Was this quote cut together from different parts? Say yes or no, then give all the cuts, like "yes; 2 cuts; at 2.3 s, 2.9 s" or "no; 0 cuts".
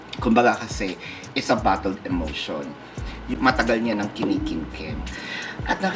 yes; 1 cut; at 3.3 s